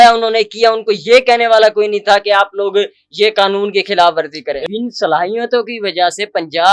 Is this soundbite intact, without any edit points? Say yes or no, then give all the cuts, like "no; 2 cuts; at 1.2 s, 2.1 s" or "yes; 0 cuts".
no; 1 cut; at 4.6 s